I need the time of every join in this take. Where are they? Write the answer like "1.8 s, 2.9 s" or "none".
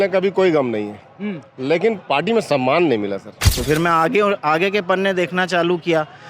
3.5 s